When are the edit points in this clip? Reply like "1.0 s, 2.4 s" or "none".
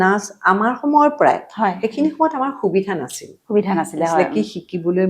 none